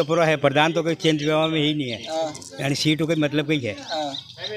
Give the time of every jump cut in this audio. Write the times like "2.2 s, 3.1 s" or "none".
none